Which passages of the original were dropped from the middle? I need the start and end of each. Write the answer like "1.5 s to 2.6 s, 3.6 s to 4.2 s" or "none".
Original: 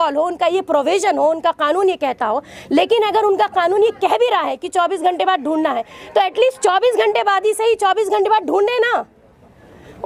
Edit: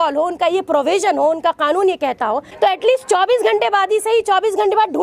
2.5 s to 6.0 s

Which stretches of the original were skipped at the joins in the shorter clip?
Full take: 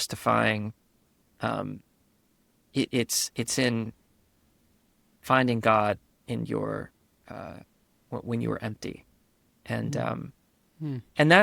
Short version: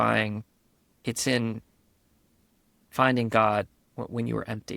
1.2 s to 3.2 s, 6.1 s to 8.0 s

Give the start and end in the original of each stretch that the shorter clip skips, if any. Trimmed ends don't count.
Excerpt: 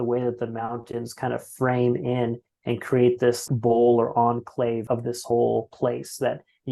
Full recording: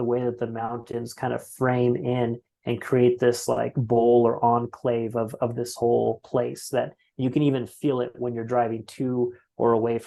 3.4 s to 3.7 s, 5.1 s to 5.3 s

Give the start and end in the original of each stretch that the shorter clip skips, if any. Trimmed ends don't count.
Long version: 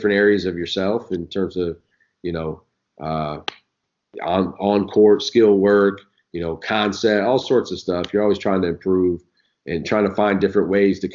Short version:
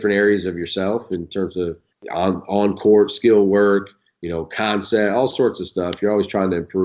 1.9 s to 4.0 s

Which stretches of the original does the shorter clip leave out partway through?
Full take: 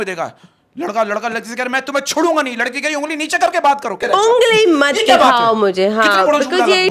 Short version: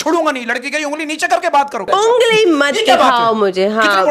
3.9 s to 4.0 s

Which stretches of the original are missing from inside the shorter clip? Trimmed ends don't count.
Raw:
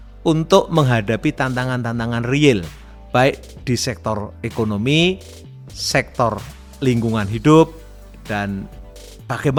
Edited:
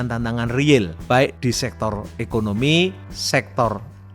3.0 s to 3.5 s, 5.3 s to 5.7 s

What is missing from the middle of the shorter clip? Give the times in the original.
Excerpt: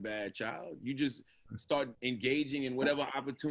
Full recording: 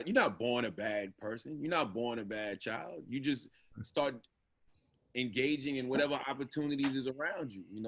4.2 s to 5.1 s

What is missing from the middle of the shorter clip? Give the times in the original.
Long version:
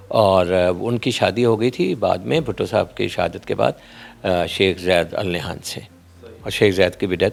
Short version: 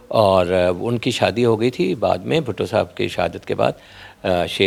none

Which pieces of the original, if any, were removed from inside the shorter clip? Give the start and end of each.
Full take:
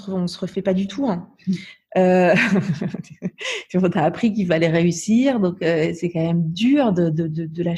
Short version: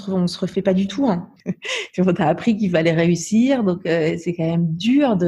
1.3 s to 3.1 s

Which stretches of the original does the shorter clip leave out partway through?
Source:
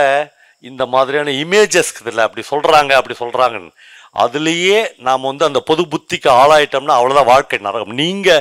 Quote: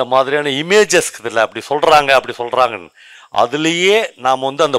none

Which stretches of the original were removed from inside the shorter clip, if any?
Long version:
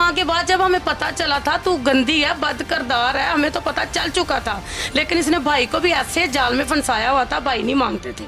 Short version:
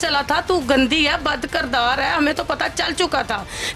none

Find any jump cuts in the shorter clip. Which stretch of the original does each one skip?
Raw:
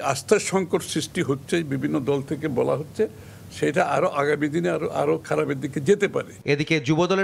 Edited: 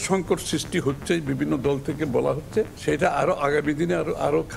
3.2 s to 3.5 s

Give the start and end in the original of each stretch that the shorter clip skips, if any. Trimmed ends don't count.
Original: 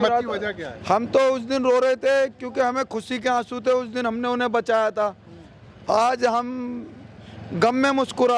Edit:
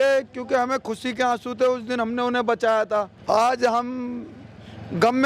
5.2 s to 5.8 s

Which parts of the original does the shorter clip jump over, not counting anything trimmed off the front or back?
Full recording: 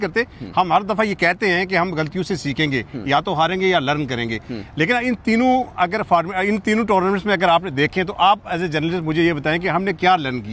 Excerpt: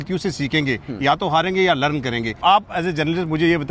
4.4 s to 8.1 s

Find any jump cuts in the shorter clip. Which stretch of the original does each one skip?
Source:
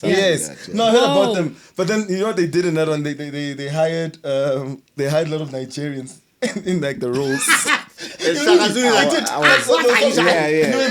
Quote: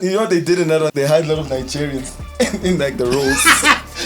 3.0 s to 4.9 s

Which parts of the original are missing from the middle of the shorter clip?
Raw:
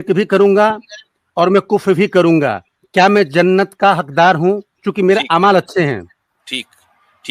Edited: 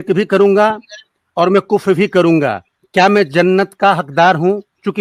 none

